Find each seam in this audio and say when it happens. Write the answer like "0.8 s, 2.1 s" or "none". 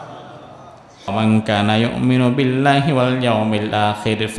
1.1 s